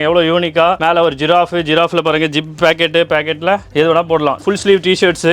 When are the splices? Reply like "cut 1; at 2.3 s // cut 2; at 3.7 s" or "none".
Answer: cut 1; at 4.4 s